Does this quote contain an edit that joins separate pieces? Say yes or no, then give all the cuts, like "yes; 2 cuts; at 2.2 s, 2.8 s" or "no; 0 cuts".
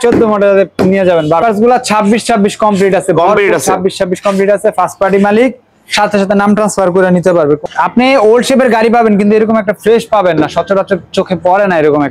yes; 2 cuts; at 1.4 s, 7.7 s